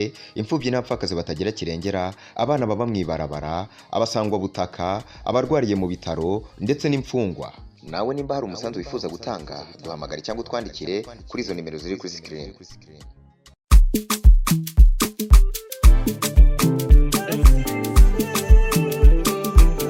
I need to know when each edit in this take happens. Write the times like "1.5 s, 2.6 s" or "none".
none